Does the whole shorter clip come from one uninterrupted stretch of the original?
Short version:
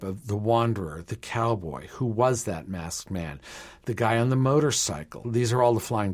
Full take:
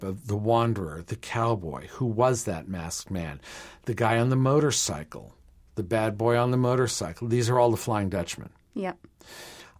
no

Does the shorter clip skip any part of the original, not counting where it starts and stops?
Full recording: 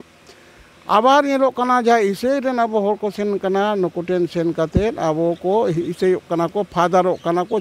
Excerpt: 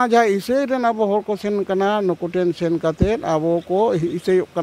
no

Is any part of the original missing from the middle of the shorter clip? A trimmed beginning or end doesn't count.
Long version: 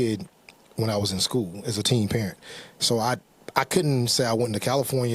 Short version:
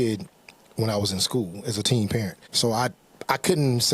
yes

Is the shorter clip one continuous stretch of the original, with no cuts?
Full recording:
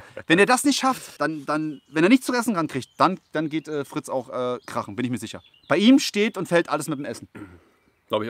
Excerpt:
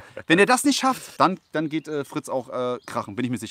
no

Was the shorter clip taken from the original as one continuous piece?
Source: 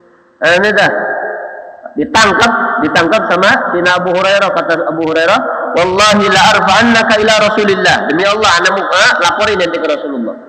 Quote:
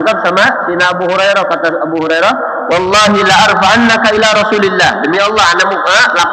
yes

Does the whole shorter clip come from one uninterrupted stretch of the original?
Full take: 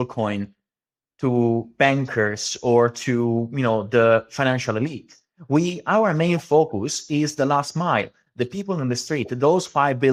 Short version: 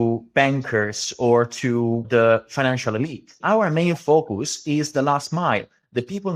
no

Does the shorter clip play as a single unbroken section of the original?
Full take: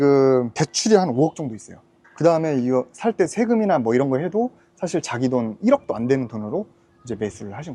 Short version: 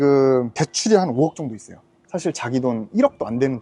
no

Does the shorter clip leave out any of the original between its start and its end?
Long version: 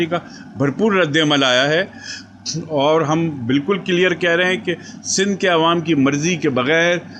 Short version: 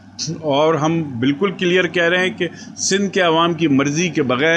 no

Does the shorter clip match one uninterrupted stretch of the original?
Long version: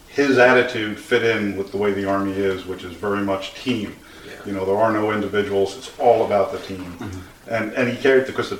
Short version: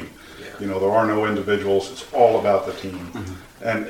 yes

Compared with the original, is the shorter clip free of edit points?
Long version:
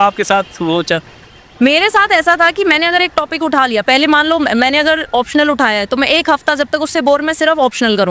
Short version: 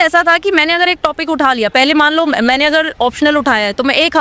yes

